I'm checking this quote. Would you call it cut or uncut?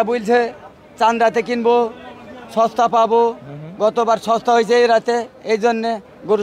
uncut